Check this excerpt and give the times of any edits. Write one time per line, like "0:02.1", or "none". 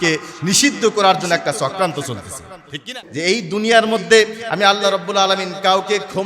0:02.9